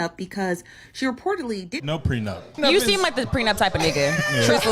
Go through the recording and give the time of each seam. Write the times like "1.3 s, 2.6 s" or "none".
1.7 s